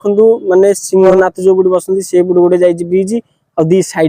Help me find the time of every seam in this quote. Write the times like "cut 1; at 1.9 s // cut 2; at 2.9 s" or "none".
cut 1; at 1.1 s

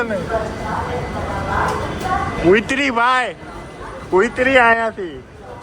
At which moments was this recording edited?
cut 1; at 2.4 s

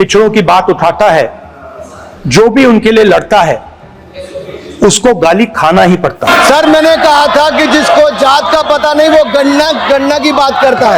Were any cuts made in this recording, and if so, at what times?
cut 1; at 6.2 s

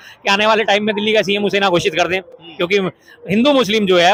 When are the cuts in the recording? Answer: none

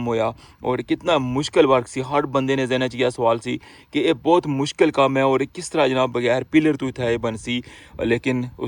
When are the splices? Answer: none

